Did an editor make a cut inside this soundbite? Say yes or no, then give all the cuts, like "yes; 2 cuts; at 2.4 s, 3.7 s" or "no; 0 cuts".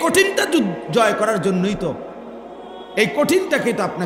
no; 0 cuts